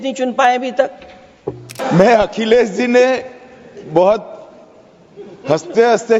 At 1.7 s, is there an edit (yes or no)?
yes